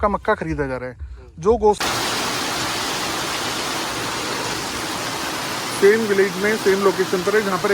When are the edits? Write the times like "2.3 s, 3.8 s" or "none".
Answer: 1.8 s